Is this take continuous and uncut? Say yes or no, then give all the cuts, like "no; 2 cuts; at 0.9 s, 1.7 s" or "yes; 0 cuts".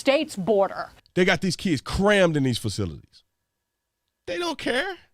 no; 1 cut; at 1.0 s